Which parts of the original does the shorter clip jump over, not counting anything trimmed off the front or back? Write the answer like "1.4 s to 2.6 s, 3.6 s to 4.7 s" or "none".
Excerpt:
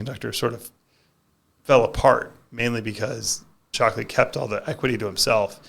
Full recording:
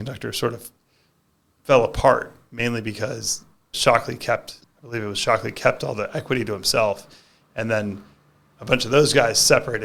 3.7 s to 5.1 s